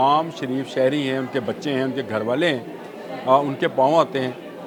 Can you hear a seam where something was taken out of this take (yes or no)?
no